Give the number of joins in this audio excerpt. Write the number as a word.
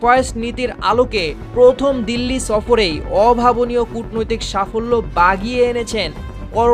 zero